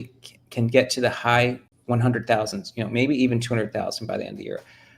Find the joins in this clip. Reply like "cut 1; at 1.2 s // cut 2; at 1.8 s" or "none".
cut 1; at 1.7 s

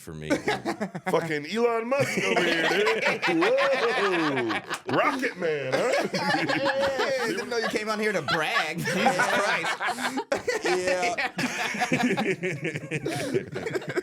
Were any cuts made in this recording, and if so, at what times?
cut 1; at 7.0 s

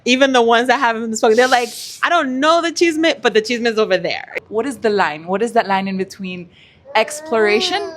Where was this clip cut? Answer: cut 1; at 4.4 s

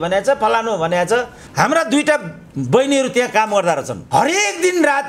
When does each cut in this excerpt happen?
cut 1; at 1.4 s

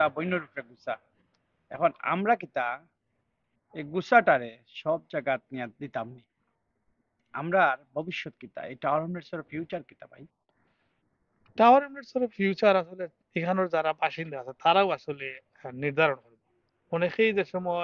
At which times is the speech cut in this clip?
none

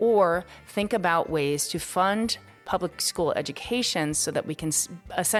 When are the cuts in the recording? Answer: none

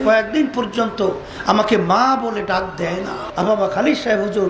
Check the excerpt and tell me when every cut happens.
cut 1; at 3.2 s

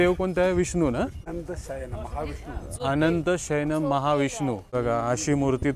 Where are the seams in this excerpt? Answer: cut 1; at 1.3 s // cut 2; at 4.7 s

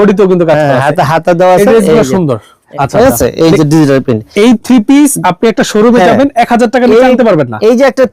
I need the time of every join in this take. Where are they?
cut 1; at 2.6 s

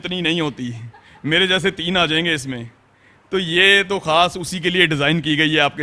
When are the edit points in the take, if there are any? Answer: none

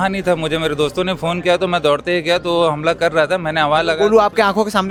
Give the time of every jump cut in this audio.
none

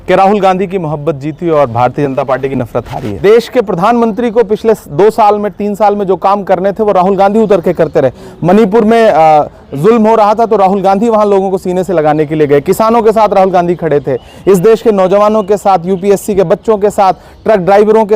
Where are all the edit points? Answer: cut 1; at 3.0 s

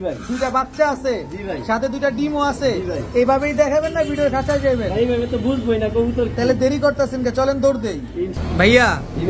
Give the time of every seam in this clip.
none

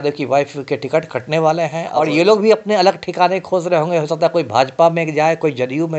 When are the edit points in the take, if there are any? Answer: cut 1; at 1.8 s

